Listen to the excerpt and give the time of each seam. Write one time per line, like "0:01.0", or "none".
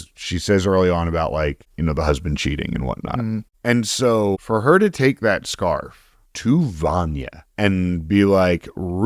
0:01.6
0:03.5
0:04.4